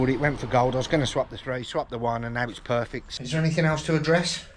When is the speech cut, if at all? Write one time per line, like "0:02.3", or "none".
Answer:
none